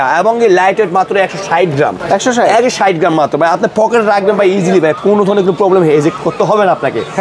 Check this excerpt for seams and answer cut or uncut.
uncut